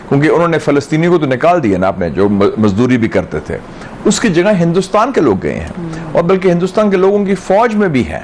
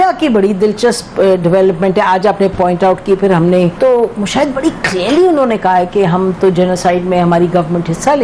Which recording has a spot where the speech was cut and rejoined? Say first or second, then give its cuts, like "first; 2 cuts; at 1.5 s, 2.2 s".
second; 1 cut; at 3.7 s